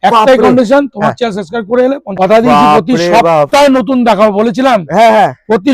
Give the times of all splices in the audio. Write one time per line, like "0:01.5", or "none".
0:02.2